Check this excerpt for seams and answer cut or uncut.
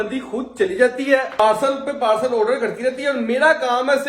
cut